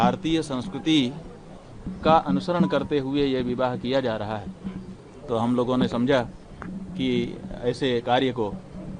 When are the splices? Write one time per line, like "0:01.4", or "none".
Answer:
none